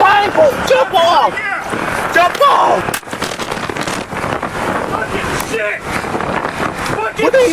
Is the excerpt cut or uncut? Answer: cut